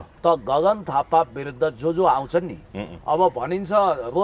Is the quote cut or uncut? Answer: uncut